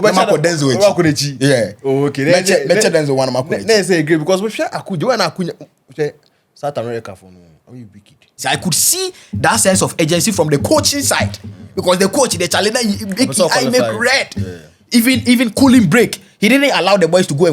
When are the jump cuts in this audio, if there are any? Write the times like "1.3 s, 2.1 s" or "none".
8.4 s